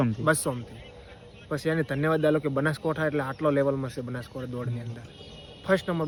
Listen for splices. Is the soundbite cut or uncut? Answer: uncut